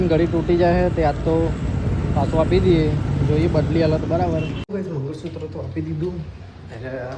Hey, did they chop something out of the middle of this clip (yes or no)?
no